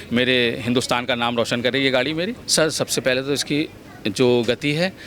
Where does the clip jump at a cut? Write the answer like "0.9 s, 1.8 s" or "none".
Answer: 2.4 s